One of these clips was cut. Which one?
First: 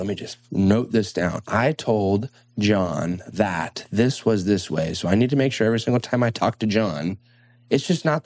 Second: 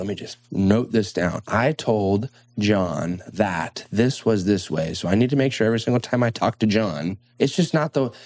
second; 1 cut; at 7.2 s

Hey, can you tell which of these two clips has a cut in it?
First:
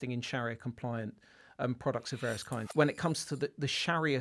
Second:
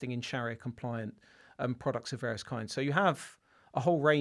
first; 1 cut; at 2.6 s

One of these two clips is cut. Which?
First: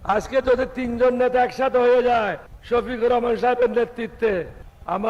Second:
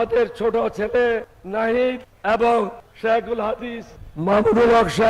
second; 2 cuts; at 2.1 s, 2.8 s

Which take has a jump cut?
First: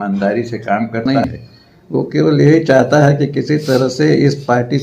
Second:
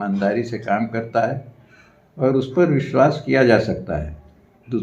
first; 1 cut; at 1.1 s

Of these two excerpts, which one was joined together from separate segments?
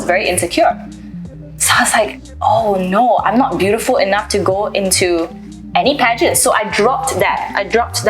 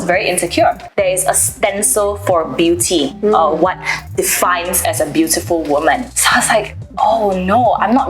second; 2 cuts; at 0.8 s, 6.1 s

